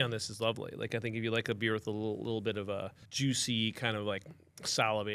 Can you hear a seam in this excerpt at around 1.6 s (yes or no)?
no